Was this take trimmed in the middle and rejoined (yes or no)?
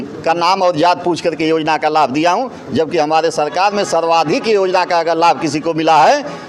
no